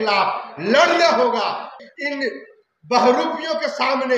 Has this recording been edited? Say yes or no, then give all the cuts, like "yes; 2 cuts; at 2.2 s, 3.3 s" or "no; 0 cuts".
yes; 1 cut; at 1.8 s